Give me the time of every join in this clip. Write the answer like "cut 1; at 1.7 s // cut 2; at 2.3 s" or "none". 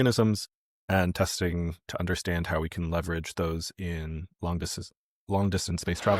cut 1; at 4.3 s